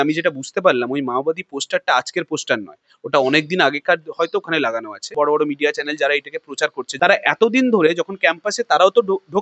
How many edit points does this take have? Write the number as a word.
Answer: two